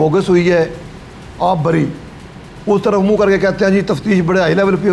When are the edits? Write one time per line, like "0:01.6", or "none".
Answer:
none

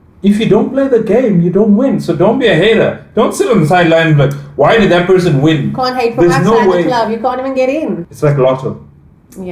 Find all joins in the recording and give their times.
0:08.0

